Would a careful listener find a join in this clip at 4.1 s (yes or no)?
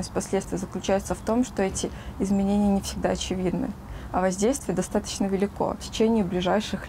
no